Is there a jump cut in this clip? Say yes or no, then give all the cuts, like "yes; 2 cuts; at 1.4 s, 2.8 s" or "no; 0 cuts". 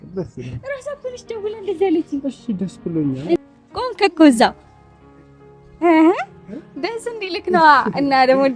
yes; 1 cut; at 3.4 s